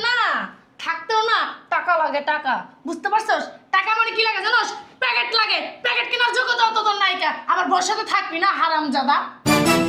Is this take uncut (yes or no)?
yes